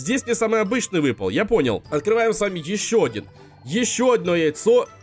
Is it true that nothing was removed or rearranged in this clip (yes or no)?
no